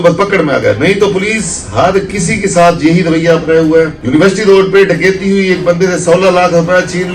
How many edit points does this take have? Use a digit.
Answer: 1